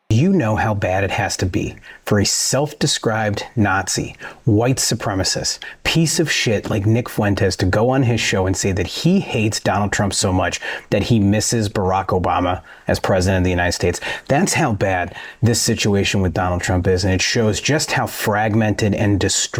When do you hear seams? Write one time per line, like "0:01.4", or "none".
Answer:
none